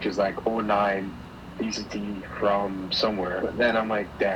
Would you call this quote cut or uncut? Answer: cut